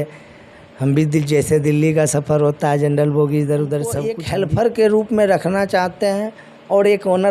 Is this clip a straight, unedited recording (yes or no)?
no